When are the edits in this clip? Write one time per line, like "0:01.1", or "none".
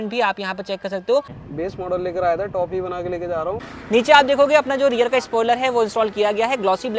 0:01.4
0:03.7

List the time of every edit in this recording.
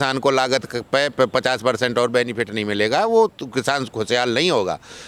none

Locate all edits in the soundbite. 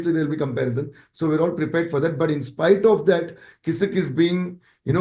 none

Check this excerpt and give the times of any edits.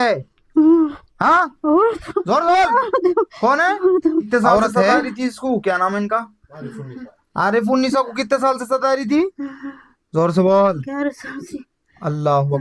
0:05.1

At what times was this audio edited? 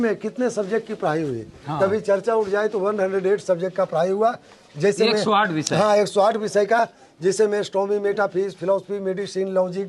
none

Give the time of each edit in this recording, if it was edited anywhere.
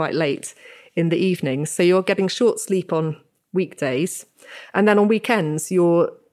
none

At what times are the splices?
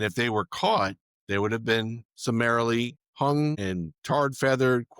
0:01.1
0:02.0
0:03.0
0:03.6

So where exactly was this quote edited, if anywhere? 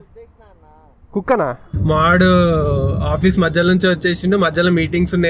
0:01.8

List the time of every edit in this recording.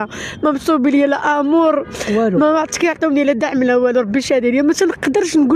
none

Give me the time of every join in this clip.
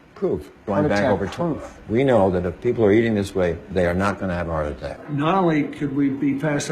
0:05.0

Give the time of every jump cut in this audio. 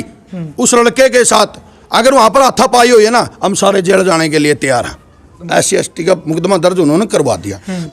0:05.4

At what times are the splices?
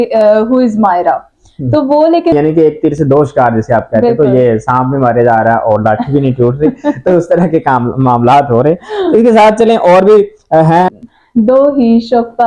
0:02.3
0:10.9

